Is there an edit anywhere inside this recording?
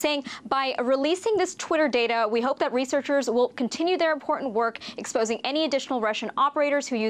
yes; 1 cut; at 1.1 s

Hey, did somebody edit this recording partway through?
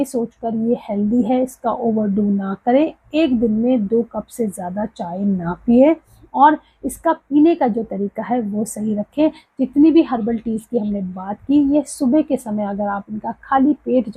no; 0 cuts

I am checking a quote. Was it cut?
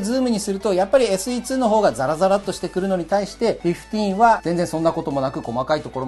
no; 0 cuts

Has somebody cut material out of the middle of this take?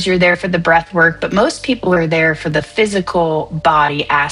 no; 0 cuts

